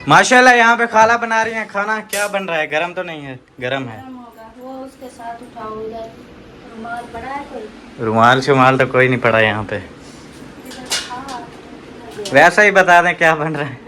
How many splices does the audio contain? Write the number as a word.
zero